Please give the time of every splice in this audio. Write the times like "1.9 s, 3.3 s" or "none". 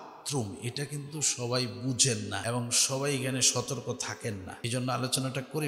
2.4 s, 4.5 s